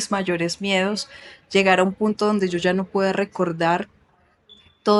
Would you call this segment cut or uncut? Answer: uncut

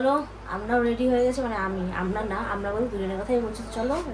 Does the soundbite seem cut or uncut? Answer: uncut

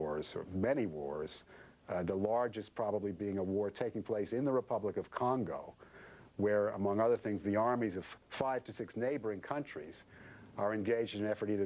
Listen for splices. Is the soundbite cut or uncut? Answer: uncut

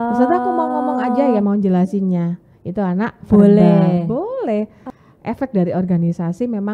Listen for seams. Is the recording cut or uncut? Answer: cut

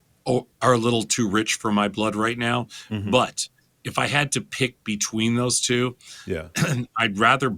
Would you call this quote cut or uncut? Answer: uncut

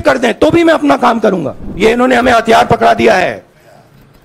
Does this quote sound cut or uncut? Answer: cut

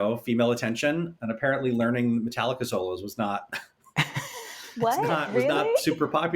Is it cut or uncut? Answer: cut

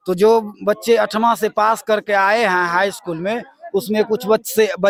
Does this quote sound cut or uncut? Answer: uncut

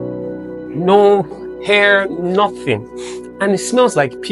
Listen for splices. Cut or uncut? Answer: uncut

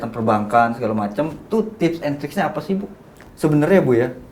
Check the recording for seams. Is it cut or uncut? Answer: cut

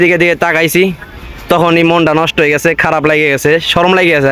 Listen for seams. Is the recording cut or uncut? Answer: uncut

